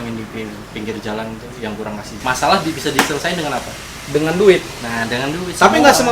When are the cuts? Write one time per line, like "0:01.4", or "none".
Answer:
0:02.1